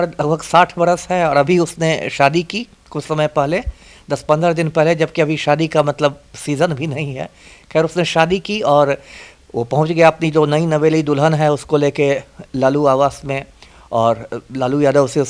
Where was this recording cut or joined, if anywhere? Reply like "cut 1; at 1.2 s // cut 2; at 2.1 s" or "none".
none